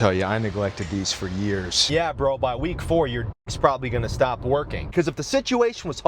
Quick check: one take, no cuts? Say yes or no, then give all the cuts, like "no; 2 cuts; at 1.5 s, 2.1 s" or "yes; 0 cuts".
no; 2 cuts; at 1.8 s, 4.9 s